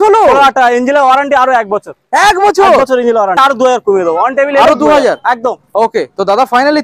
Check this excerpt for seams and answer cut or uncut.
cut